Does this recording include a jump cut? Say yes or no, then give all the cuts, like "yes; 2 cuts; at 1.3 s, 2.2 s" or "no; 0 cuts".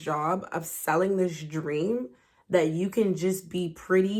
no; 0 cuts